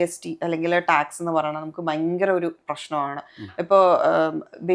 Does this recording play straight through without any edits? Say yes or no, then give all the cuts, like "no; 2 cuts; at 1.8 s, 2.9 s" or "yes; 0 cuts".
yes; 0 cuts